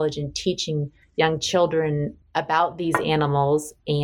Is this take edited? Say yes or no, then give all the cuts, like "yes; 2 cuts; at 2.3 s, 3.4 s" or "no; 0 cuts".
yes; 2 cuts; at 1.0 s, 2.2 s